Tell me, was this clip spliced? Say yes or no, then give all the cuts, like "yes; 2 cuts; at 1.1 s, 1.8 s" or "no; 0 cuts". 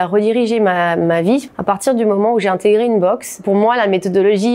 yes; 2 cuts; at 1.5 s, 3.4 s